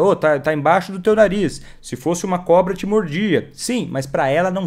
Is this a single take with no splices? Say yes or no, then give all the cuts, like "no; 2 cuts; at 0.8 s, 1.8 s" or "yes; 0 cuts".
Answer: yes; 0 cuts